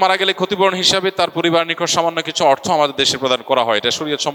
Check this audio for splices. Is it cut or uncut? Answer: uncut